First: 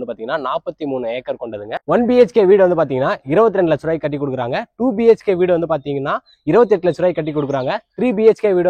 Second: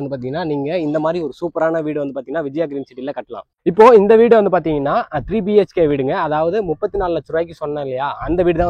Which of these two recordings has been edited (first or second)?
first